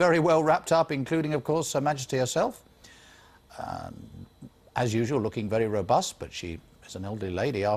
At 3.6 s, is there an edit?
no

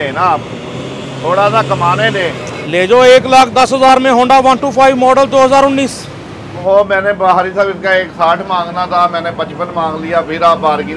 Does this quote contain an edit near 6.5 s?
yes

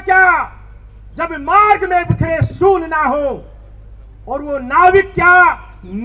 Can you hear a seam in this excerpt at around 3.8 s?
no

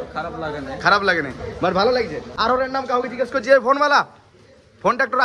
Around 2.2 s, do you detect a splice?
no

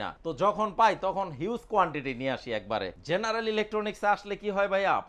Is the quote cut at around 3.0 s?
yes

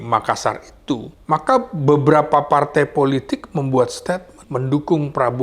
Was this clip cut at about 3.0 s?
no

